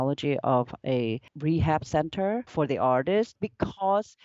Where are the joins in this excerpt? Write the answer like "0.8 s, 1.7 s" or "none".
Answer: 1.3 s, 2.5 s, 3.4 s